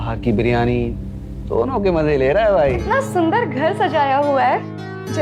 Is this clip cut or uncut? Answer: cut